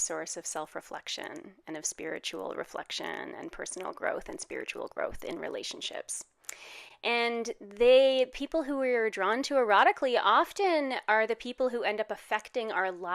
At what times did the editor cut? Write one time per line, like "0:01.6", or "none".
none